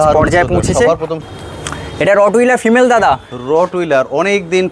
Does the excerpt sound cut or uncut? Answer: cut